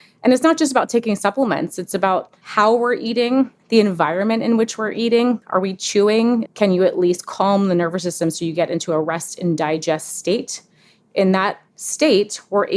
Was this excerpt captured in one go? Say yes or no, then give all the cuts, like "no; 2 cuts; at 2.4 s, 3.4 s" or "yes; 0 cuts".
no; 2 cuts; at 2.4 s, 6.5 s